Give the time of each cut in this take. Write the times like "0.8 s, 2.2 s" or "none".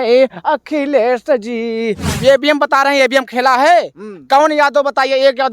2.1 s